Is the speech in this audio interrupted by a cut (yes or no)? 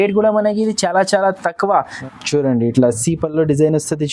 yes